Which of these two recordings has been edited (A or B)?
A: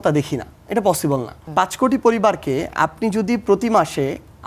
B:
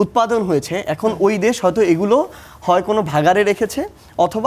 A